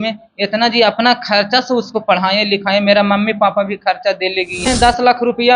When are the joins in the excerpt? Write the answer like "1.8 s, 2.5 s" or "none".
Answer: 4.7 s